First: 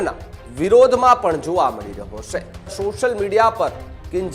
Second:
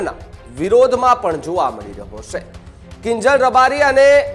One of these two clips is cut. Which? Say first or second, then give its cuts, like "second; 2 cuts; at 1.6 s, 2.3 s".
first; 1 cut; at 2.7 s